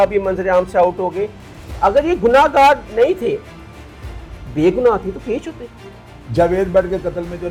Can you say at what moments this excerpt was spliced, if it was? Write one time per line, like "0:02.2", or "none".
none